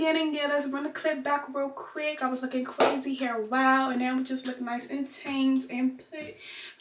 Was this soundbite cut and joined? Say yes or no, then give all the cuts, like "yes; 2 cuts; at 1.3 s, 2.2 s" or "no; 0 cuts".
no; 0 cuts